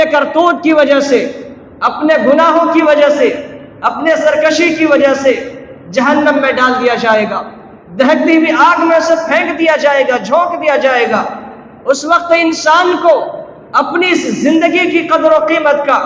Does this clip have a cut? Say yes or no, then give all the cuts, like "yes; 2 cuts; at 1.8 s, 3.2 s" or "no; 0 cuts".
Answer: no; 0 cuts